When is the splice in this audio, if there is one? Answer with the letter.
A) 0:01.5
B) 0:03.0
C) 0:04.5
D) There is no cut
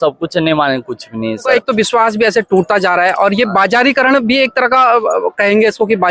A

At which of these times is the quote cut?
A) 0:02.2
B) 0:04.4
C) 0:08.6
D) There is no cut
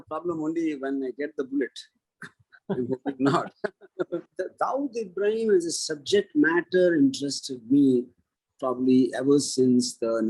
B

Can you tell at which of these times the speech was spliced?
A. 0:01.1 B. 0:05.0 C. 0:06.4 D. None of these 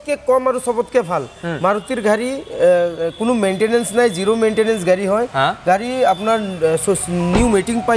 D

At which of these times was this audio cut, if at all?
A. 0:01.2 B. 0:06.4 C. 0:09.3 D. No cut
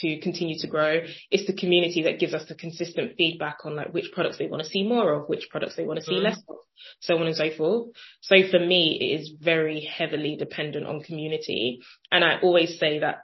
D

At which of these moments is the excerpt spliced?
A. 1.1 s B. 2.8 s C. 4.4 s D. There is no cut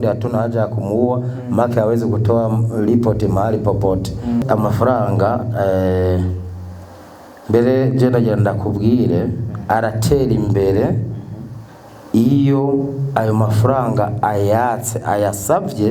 C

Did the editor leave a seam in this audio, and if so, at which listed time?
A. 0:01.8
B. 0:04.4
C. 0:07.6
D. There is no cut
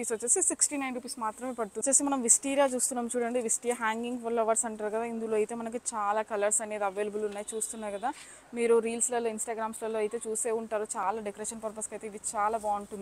A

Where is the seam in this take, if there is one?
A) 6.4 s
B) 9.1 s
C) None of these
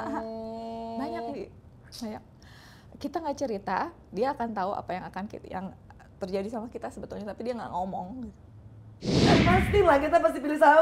B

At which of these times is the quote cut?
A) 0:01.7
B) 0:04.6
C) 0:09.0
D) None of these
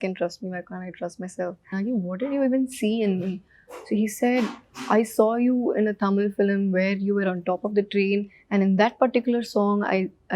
A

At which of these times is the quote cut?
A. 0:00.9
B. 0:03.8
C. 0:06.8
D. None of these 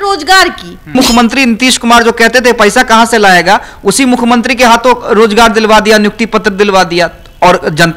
A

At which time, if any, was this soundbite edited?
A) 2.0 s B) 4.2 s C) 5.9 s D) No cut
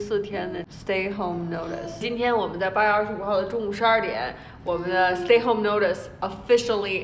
A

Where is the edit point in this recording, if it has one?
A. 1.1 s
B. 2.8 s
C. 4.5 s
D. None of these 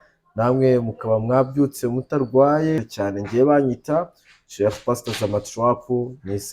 B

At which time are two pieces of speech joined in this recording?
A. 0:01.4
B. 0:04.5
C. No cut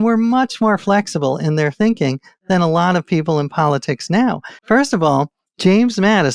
B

